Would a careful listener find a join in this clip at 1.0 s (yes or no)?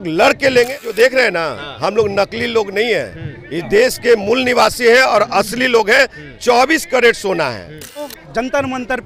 yes